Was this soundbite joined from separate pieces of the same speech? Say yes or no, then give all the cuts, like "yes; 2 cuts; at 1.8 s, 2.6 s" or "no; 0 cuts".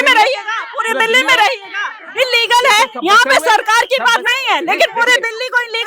no; 0 cuts